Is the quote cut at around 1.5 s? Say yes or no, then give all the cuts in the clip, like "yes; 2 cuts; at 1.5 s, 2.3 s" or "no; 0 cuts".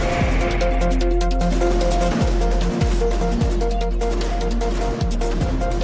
no; 0 cuts